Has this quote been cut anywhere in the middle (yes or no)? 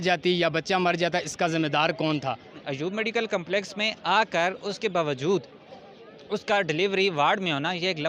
yes